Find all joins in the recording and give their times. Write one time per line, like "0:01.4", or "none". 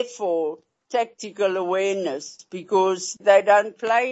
0:03.1